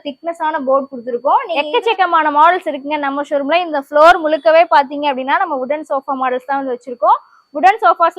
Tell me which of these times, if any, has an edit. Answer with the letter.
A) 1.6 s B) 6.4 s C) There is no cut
A